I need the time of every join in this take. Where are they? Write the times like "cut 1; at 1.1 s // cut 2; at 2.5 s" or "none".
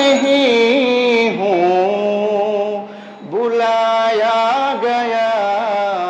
none